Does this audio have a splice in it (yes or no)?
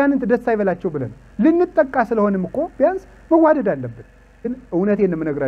yes